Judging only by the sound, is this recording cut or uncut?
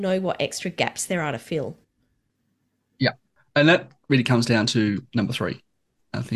uncut